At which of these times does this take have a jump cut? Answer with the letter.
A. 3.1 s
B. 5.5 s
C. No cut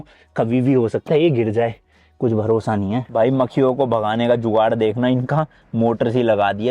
A